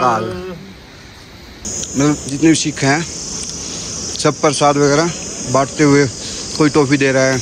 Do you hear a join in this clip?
yes; 1 cut; at 1.6 s

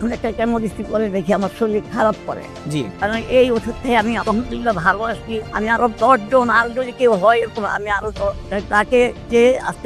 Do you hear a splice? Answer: yes; 1 cut; at 3.0 s

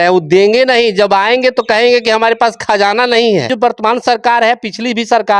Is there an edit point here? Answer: yes; 1 cut; at 3.5 s

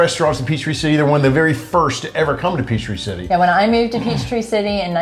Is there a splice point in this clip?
no; 0 cuts

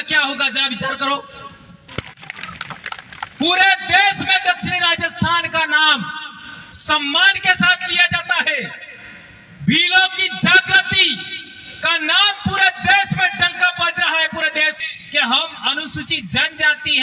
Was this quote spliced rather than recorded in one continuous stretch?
yes; 2 cuts; at 1.9 s, 14.8 s

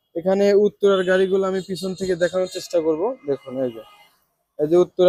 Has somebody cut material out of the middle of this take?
no; 0 cuts

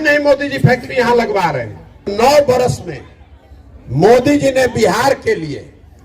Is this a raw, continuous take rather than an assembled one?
no; 1 cut; at 2.1 s

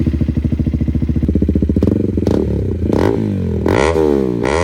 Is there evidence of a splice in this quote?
yes; 1 cut; at 1.3 s

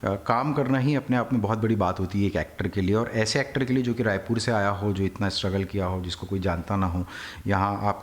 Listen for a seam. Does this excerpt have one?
no; 0 cuts

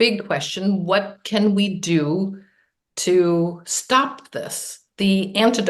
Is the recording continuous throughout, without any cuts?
yes; 0 cuts

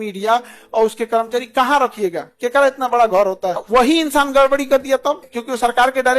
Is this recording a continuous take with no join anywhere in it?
no; 2 cuts; at 3.6 s, 5.3 s

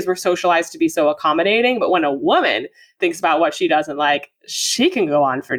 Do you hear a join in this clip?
no; 0 cuts

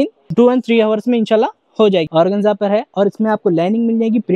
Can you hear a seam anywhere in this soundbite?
yes; 1 cut; at 2.1 s

